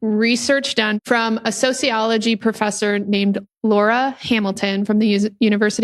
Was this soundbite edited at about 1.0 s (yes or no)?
yes